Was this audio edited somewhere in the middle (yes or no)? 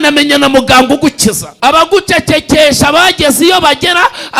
yes